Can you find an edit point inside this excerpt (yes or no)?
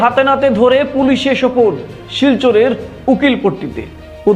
no